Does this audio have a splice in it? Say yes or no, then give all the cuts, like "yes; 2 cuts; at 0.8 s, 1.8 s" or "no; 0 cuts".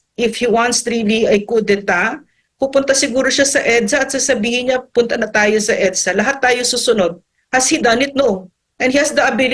no; 0 cuts